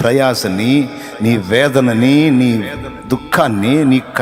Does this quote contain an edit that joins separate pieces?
no; 0 cuts

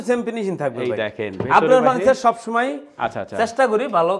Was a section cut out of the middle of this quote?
no; 0 cuts

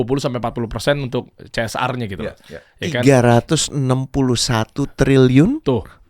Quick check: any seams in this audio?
no; 0 cuts

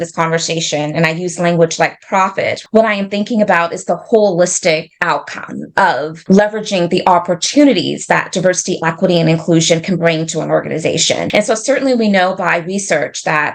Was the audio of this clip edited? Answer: yes; 3 cuts; at 2.6 s, 6.1 s, 11.3 s

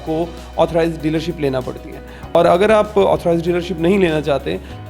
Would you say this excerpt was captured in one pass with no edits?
no; 1 cut; at 2.4 s

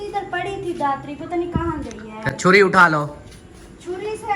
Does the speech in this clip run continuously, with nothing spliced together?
yes; 0 cuts

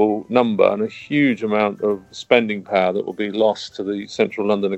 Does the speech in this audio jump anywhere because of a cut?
no; 0 cuts

